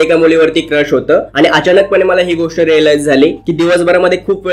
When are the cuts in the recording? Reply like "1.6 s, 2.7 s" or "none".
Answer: none